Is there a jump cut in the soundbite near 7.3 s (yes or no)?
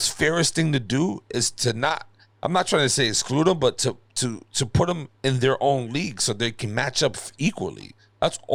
no